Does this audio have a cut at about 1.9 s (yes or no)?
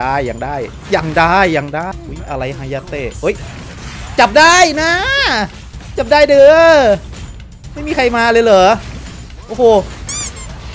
yes